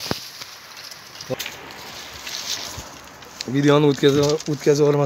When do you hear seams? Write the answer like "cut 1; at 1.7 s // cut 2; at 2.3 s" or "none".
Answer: cut 1; at 1.3 s